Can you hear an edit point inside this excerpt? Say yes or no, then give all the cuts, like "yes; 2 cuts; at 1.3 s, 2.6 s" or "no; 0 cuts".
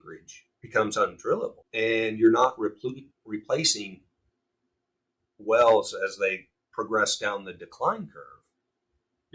yes; 1 cut; at 1.6 s